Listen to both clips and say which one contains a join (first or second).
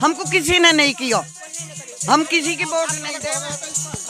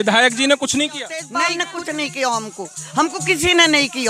second